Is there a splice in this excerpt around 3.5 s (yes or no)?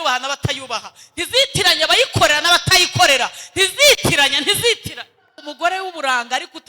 no